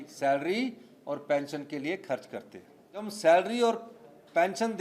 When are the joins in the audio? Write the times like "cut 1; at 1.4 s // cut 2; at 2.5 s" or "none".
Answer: cut 1; at 3.0 s